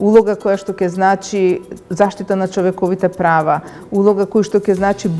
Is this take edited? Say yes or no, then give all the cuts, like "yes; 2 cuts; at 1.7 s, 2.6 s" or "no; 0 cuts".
no; 0 cuts